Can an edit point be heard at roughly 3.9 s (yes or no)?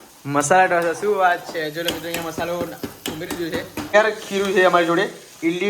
yes